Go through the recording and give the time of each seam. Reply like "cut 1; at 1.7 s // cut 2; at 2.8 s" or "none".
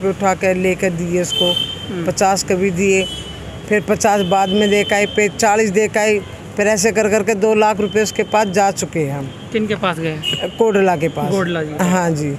none